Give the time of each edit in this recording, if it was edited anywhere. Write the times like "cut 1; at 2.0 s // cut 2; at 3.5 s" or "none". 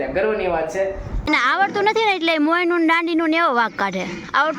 cut 1; at 1.3 s

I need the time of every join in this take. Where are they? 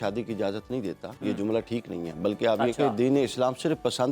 cut 1; at 1.1 s

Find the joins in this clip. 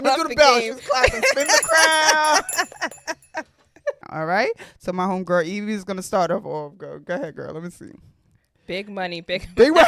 cut 1; at 4.0 s

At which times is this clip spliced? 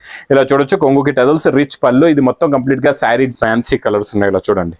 cut 1; at 3.3 s

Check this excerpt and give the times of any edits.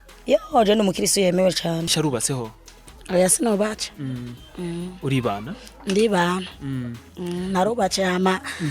cut 1; at 1.9 s

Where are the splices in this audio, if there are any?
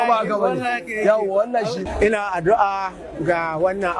cut 1; at 1.9 s

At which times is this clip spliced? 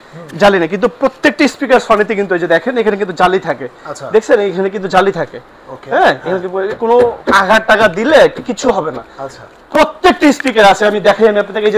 none

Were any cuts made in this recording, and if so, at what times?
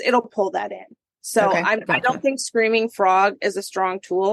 none

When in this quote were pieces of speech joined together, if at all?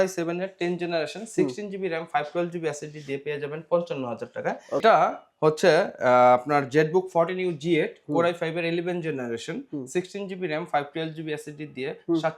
cut 1; at 4.8 s

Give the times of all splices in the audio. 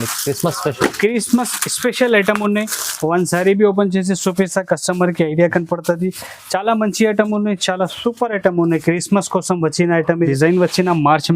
cut 1; at 10.3 s

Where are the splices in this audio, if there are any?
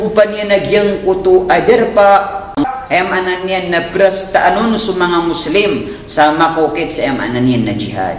cut 1; at 2.6 s

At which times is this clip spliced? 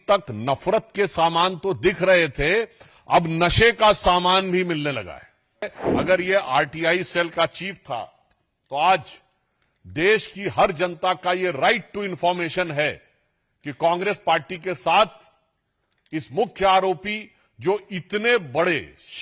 cut 1; at 5.8 s

